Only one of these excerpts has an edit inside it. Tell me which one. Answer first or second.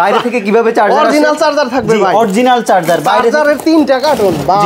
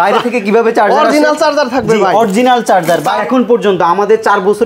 second